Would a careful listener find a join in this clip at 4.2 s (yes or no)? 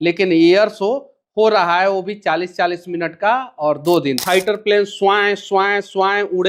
yes